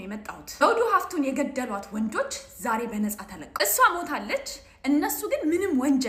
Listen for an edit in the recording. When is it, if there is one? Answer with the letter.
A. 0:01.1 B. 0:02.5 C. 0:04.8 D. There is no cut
D